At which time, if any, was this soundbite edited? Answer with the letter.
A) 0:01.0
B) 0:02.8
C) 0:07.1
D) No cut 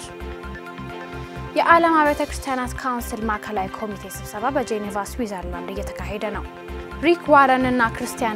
A